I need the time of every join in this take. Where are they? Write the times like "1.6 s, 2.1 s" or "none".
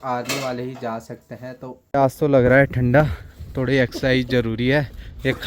1.8 s